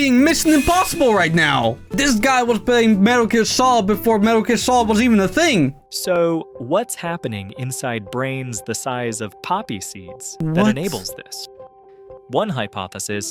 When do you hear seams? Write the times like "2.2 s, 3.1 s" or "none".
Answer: none

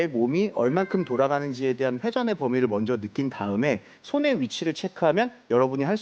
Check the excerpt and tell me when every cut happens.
4.0 s

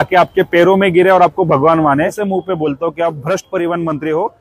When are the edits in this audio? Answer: 2.2 s

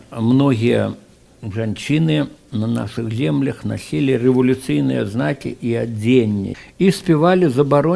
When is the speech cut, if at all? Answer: 6.5 s

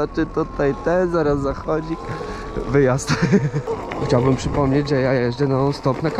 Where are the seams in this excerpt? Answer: 3.6 s

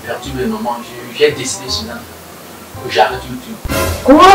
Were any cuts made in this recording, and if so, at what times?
none

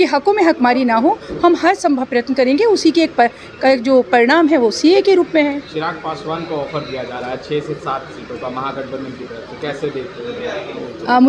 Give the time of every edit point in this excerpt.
none

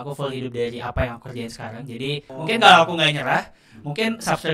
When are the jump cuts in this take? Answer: 2.3 s

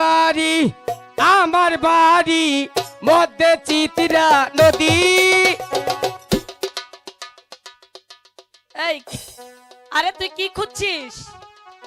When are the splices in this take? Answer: none

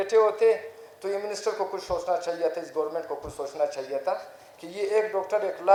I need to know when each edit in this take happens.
none

